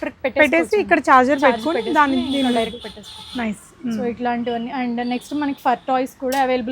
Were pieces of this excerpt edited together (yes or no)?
no